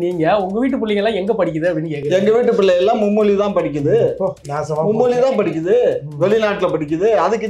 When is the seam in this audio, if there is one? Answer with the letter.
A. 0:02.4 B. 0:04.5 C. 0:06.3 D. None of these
B